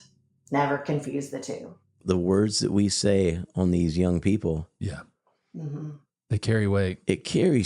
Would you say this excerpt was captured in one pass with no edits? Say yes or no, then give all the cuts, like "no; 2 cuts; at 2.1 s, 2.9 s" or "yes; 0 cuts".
no; 1 cut; at 2.0 s